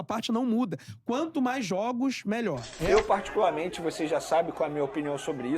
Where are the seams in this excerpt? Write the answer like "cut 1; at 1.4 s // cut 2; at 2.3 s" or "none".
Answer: cut 1; at 2.7 s